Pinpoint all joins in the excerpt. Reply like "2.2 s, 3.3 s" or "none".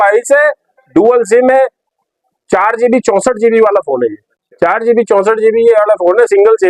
none